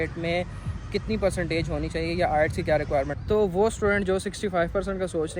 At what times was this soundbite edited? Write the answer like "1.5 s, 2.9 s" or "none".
3.2 s

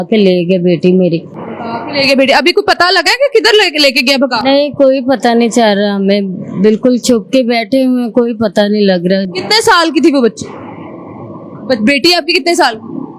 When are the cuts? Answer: none

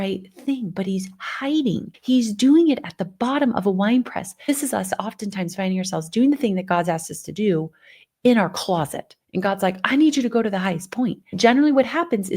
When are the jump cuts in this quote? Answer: 1.9 s, 4.5 s, 11.3 s

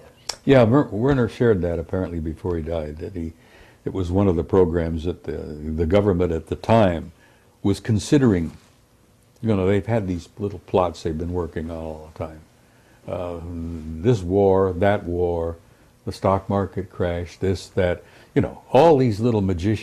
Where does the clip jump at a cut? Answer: 8.5 s

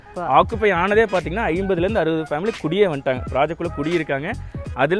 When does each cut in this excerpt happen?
none

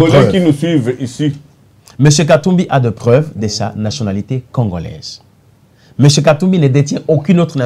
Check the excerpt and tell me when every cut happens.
none

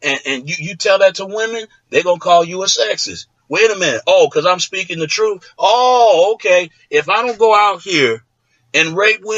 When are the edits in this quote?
none

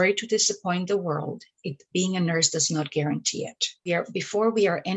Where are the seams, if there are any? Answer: 3.9 s

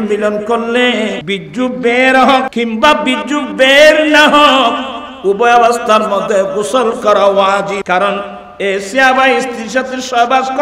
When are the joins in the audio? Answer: 1.2 s, 2.5 s, 7.8 s

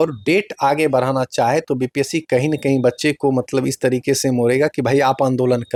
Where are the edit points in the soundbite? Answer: none

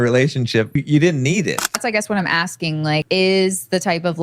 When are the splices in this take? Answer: 0.8 s, 1.8 s, 3.0 s

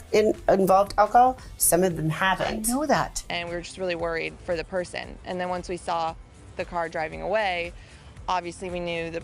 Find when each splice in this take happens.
3.2 s

